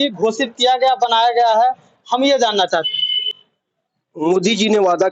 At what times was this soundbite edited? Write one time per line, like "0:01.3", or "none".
none